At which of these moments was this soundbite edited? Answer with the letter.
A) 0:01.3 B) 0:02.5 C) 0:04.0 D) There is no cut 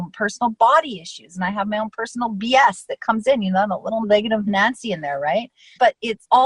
C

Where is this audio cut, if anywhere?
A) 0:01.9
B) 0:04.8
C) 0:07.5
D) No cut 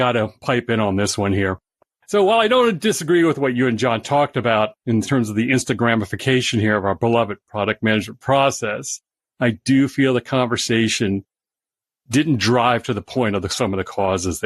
A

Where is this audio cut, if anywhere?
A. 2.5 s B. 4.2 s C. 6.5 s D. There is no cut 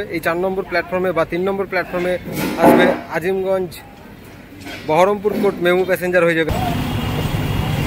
C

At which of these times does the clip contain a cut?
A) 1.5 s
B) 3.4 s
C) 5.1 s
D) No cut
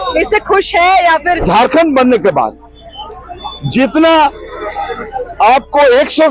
A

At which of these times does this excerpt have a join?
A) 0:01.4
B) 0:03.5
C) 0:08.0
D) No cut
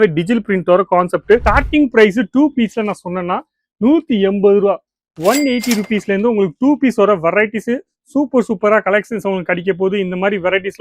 A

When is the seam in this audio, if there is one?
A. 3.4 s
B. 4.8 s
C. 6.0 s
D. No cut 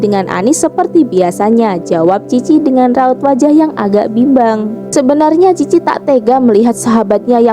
B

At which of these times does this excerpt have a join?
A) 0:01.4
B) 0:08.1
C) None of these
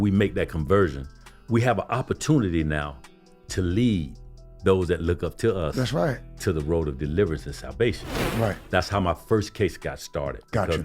B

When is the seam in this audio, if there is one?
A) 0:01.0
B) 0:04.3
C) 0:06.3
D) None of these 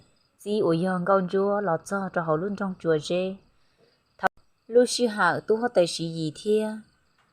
B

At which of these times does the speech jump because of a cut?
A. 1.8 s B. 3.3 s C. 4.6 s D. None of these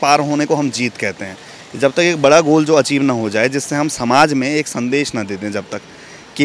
D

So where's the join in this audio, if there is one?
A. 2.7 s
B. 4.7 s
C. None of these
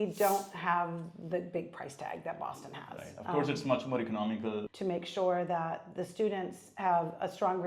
B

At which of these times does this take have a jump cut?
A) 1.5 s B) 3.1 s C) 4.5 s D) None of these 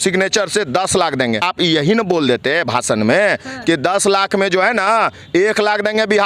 A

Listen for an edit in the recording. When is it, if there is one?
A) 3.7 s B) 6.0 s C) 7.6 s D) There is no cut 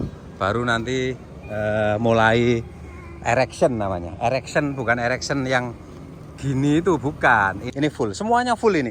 C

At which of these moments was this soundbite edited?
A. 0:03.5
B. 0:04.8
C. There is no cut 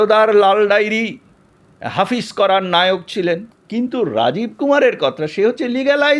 A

